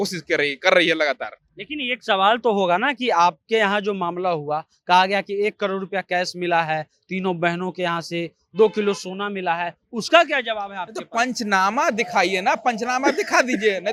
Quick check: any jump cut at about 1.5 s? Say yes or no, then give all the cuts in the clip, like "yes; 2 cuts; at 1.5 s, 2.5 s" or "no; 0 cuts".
no; 0 cuts